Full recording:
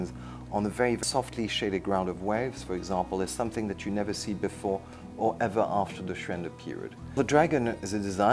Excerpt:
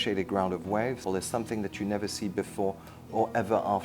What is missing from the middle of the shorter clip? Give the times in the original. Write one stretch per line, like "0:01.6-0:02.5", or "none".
0:02.6-0:03.1